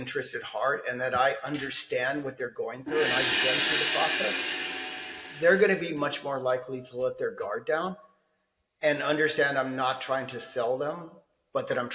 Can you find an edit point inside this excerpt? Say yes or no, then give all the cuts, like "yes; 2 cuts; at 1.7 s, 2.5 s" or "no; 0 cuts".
no; 0 cuts